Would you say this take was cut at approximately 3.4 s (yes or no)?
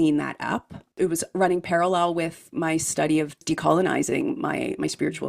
yes